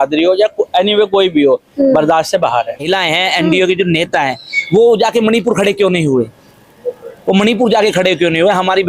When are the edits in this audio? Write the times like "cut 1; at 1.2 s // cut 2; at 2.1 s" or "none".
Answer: cut 1; at 2.8 s